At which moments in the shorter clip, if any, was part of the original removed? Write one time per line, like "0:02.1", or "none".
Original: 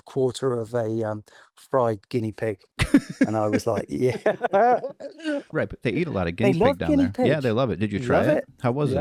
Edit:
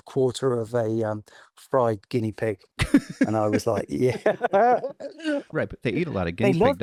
none